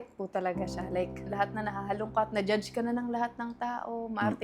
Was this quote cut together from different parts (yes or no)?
yes